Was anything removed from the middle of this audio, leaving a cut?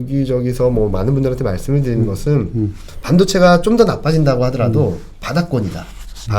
no; 0 cuts

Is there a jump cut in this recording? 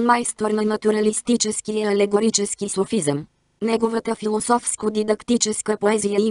yes; 1 cut; at 3.0 s

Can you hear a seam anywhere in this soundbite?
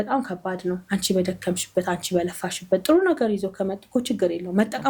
no; 0 cuts

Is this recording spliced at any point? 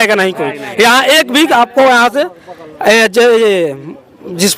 no; 0 cuts

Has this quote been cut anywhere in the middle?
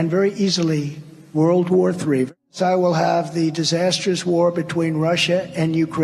yes; 1 cut; at 2.3 s

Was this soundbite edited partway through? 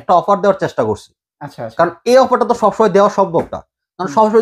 no; 0 cuts

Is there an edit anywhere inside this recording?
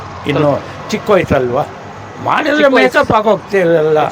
no; 0 cuts

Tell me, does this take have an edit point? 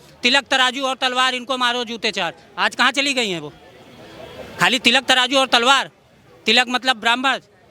no; 0 cuts

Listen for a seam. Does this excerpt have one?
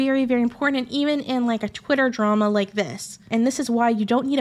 yes; 1 cut; at 3.3 s

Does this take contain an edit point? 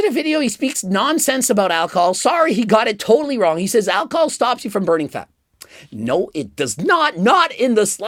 no; 0 cuts

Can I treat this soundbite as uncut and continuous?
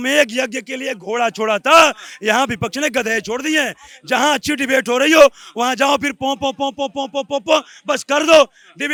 yes; 0 cuts

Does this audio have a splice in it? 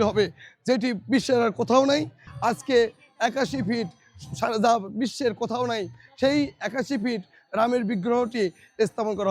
yes; 1 cut; at 2.2 s

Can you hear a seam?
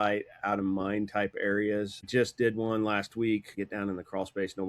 yes; 2 cuts; at 2.1 s, 3.5 s

